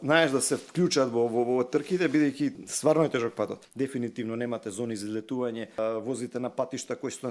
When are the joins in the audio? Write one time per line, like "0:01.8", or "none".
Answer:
0:02.7
0:03.6
0:05.8